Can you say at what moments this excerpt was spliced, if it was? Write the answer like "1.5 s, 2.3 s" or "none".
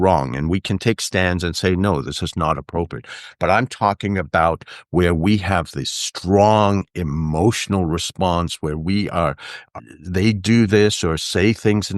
9.7 s